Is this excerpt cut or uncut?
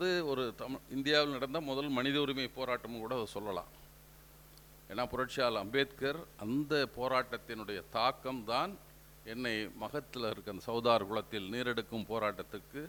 uncut